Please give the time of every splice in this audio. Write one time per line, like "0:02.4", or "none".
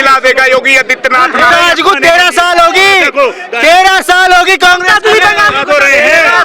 0:01.5